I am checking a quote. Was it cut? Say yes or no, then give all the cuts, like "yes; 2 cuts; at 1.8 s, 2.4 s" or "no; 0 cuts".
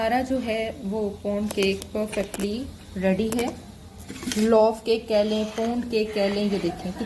no; 0 cuts